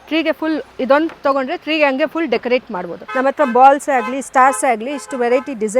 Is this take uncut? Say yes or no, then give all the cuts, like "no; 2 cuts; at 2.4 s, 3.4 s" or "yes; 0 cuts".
no; 1 cut; at 3.0 s